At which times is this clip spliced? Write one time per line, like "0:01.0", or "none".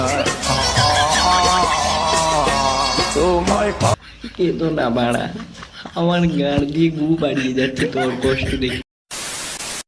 0:04.1
0:08.9